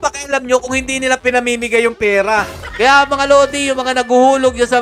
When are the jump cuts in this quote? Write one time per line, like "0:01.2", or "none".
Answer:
0:02.6